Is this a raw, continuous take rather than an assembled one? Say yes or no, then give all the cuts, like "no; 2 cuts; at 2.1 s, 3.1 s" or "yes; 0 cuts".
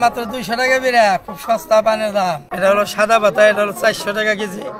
no; 1 cut; at 2.5 s